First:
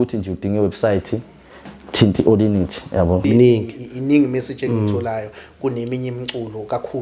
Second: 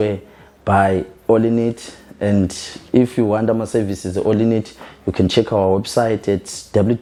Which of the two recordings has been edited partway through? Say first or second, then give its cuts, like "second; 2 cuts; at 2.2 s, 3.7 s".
first; 1 cut; at 3.2 s